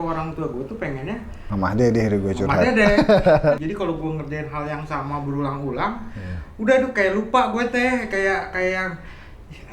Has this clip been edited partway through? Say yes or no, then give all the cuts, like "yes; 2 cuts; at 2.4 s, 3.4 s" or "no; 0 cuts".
yes; 1 cut; at 3.6 s